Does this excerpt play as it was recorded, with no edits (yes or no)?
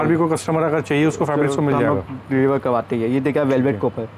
yes